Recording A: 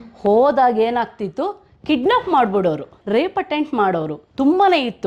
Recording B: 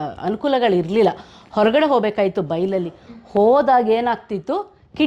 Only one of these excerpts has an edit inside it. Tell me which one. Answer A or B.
A